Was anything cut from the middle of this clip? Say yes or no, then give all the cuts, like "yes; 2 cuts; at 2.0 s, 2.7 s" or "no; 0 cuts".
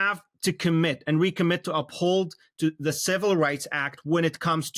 no; 0 cuts